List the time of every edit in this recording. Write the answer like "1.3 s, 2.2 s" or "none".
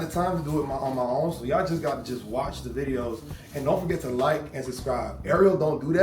none